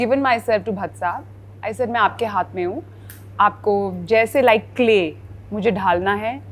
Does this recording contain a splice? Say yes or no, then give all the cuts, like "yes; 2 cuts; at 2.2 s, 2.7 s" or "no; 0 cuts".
no; 0 cuts